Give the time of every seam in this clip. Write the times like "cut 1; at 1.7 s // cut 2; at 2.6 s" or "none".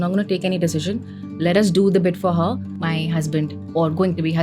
cut 1; at 2.7 s